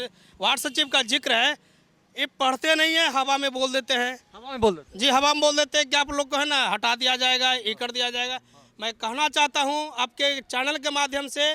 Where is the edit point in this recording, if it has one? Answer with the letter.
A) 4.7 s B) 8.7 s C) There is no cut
C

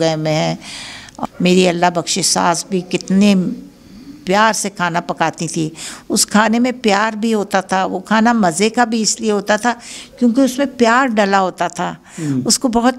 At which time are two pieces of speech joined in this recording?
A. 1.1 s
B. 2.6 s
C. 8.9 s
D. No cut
A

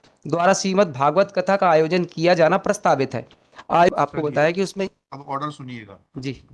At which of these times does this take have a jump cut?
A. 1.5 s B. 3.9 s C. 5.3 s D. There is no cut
B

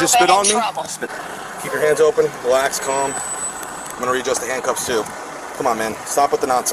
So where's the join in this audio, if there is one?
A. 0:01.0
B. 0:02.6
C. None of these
A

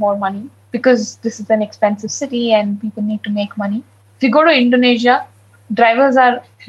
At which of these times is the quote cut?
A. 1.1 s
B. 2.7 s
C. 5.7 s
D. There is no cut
D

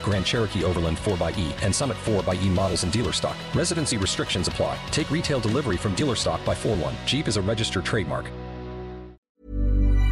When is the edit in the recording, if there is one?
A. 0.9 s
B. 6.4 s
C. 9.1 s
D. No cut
C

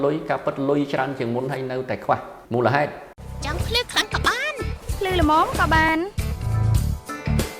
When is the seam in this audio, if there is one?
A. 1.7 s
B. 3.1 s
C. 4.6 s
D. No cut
B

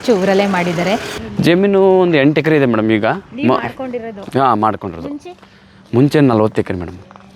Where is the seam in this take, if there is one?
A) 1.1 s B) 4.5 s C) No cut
A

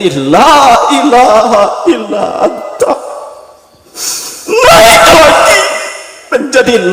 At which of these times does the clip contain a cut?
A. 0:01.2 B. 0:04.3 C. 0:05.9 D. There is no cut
D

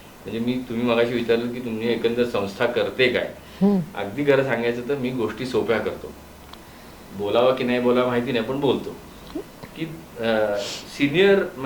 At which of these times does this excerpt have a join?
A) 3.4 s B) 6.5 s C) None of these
B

